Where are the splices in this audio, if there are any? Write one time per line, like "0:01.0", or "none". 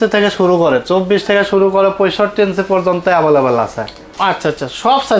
none